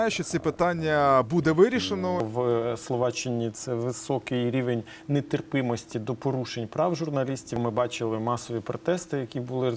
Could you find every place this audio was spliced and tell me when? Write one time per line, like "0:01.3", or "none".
0:02.3
0:07.6